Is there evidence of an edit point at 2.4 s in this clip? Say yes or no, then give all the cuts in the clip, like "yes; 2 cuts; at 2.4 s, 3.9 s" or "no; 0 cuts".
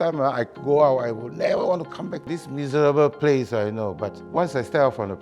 yes; 2 cuts; at 2.4 s, 4.1 s